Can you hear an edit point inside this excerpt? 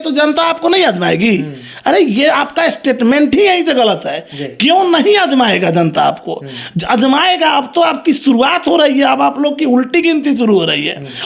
no; 0 cuts

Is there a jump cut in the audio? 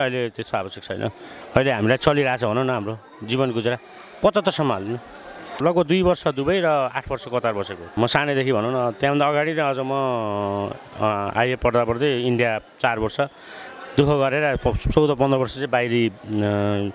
yes; 2 cuts; at 5.6 s, 7.9 s

